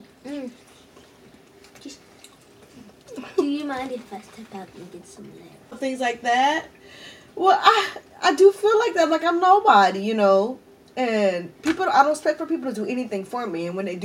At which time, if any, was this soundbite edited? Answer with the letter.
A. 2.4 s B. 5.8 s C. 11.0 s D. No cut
B